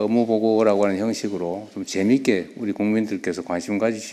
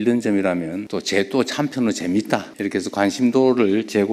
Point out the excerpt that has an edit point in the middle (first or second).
second